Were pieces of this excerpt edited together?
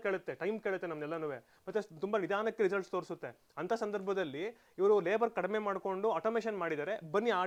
no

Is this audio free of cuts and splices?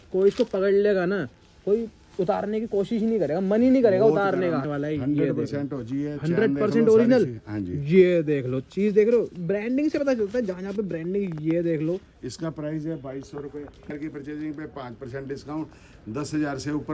no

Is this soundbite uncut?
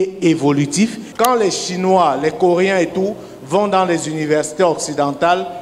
no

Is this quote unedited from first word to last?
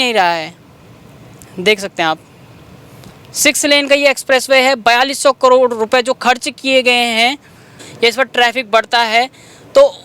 no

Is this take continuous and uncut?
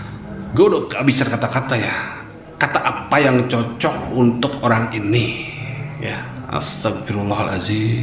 yes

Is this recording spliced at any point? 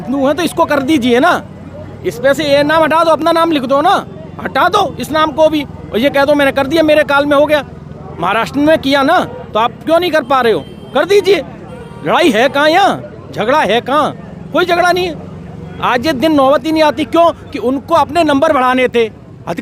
no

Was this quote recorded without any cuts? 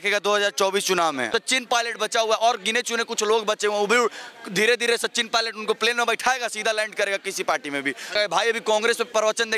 no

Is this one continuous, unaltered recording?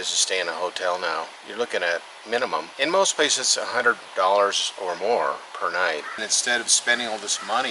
no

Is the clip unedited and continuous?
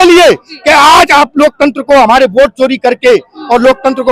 yes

